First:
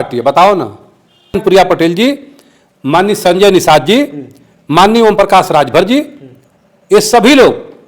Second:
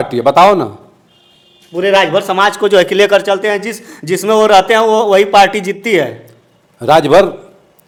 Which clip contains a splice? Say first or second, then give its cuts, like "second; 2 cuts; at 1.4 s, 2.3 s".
first; 1 cut; at 1.4 s